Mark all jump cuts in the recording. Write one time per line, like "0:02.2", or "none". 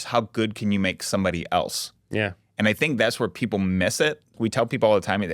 0:04.3